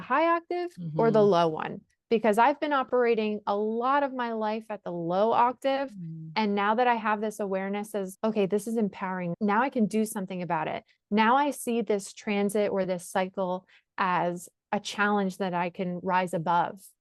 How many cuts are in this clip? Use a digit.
0